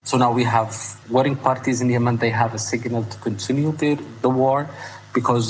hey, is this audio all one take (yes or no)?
no